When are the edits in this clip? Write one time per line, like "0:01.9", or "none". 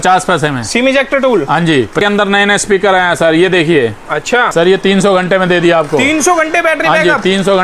0:02.0
0:04.5